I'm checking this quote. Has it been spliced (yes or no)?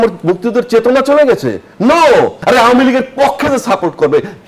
yes